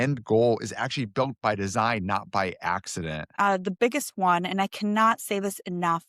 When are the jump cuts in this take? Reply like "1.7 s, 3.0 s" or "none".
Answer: 3.3 s